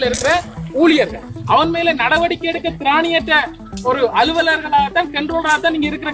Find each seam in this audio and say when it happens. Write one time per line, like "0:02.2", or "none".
0:01.3